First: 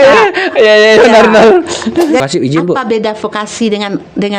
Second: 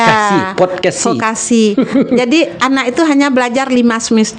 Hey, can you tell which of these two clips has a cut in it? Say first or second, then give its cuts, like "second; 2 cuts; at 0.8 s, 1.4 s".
first; 1 cut; at 2.2 s